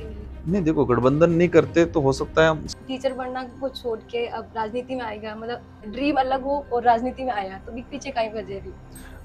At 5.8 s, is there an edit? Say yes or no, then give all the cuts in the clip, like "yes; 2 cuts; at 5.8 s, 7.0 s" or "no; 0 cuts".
yes; 2 cuts; at 2.6 s, 5.8 s